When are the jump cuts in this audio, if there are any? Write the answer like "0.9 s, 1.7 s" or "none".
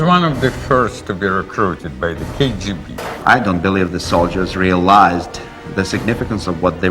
2.9 s